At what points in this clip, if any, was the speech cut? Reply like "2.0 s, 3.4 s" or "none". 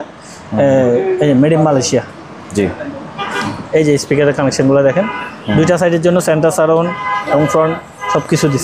none